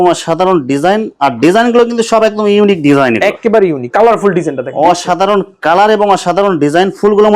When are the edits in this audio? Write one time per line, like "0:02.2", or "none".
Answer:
0:03.9